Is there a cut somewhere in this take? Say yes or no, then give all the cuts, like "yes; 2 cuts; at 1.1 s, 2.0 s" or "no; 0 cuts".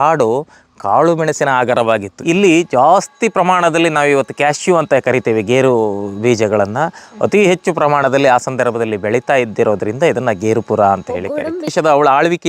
yes; 2 cuts; at 2.1 s, 11.7 s